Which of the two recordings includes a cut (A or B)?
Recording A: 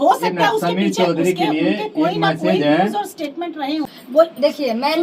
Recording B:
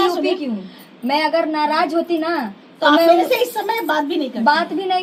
A